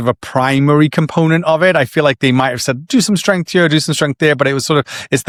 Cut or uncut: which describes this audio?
uncut